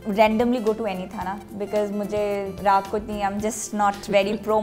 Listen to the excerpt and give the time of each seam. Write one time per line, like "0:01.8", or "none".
none